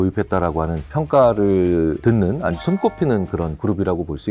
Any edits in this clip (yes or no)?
no